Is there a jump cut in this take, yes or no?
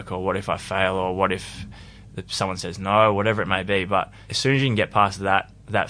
no